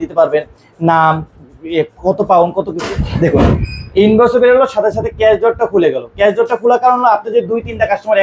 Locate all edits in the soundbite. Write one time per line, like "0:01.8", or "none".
0:02.9